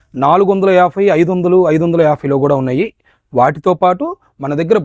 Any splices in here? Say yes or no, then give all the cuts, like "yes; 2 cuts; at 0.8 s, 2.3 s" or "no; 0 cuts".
no; 0 cuts